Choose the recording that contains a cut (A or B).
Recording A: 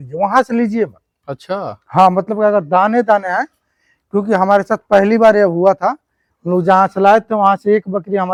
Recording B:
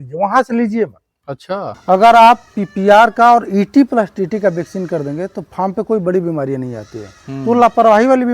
B